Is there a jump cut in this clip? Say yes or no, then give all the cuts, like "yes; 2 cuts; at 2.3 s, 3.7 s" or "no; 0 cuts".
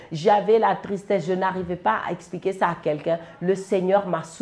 no; 0 cuts